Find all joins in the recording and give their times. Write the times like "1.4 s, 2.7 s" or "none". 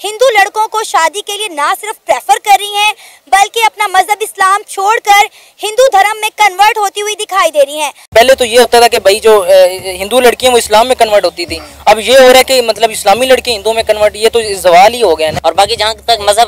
8.1 s, 15.3 s